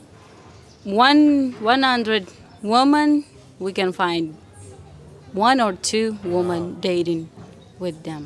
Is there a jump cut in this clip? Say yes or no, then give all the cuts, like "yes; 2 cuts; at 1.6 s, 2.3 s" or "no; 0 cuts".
no; 0 cuts